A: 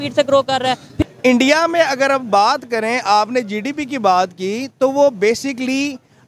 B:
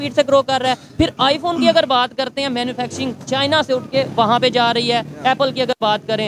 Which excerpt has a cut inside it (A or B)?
A